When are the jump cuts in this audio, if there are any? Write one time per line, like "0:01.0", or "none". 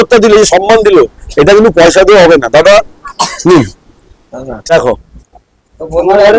0:04.7